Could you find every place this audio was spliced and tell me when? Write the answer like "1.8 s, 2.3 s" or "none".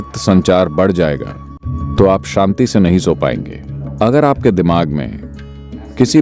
none